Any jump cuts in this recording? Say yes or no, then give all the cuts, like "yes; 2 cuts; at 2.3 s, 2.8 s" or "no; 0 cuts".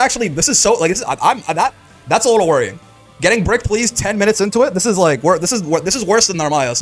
no; 0 cuts